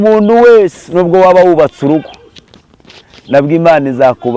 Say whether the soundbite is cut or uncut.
uncut